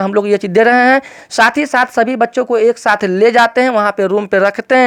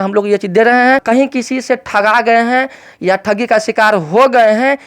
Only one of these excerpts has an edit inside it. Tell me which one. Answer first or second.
second